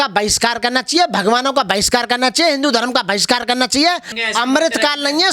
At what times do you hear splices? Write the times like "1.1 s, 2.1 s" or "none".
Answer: 4.1 s